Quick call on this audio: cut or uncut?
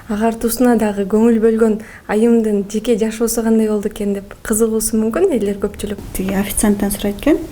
cut